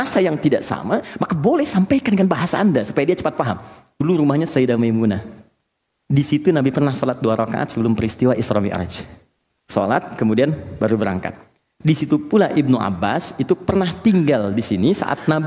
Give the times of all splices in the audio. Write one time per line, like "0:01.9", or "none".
0:04.0